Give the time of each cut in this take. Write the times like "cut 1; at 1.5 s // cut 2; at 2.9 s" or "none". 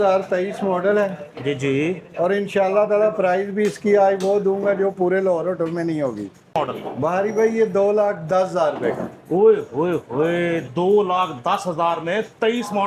cut 1; at 6.5 s